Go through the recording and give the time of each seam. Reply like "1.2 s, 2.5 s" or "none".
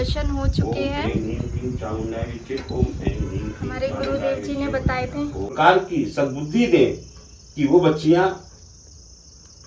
5.5 s